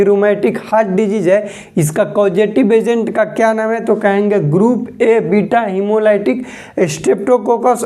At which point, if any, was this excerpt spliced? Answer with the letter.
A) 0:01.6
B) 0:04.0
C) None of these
C